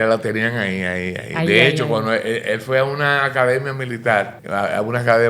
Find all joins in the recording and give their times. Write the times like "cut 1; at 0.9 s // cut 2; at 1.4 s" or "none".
cut 1; at 4.4 s